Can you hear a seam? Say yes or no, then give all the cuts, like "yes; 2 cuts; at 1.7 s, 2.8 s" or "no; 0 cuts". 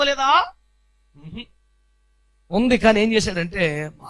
no; 0 cuts